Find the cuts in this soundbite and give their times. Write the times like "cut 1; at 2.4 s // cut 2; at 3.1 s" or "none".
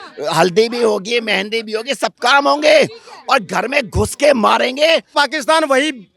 cut 1; at 5.1 s